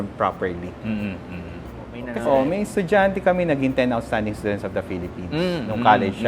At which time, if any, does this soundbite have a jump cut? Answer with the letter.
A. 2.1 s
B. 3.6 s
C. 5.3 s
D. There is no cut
A